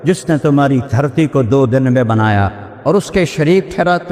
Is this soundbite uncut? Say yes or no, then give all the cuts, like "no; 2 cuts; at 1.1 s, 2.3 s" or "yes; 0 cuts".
no; 1 cut; at 2.7 s